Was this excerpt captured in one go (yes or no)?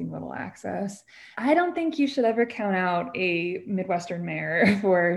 no